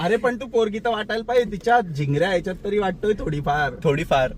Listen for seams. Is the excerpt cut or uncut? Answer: uncut